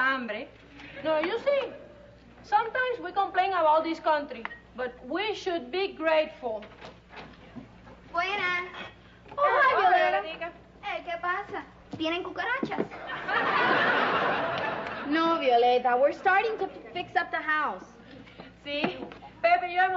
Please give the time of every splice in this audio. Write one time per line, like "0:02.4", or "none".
none